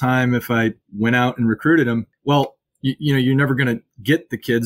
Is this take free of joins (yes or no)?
no